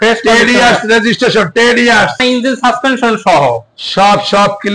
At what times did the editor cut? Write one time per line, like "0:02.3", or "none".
0:02.2